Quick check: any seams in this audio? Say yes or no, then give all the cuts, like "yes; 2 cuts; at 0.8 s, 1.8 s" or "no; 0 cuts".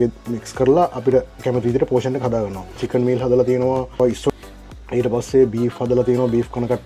yes; 2 cuts; at 2.8 s, 4.2 s